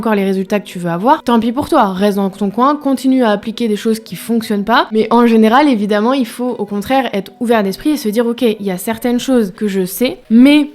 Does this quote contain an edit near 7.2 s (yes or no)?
no